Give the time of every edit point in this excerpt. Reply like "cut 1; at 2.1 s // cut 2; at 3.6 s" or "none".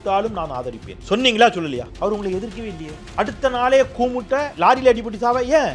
cut 1; at 0.9 s // cut 2; at 1.9 s // cut 3; at 2.9 s // cut 4; at 4.5 s